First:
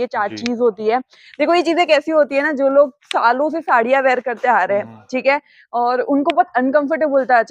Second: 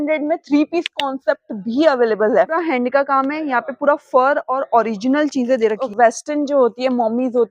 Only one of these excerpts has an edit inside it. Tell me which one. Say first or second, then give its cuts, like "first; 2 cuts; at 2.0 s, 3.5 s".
second; 2 cuts; at 2.6 s, 5.8 s